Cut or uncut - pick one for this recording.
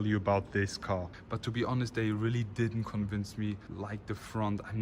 cut